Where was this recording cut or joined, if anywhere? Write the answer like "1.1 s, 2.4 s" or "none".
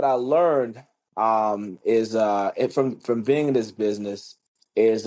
none